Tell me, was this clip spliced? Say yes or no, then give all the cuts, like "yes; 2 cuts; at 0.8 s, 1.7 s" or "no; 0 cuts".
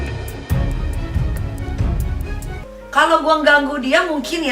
yes; 1 cut; at 2.5 s